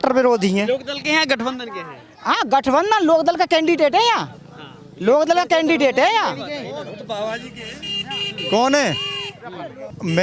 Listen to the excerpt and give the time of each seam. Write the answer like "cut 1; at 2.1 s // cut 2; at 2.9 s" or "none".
none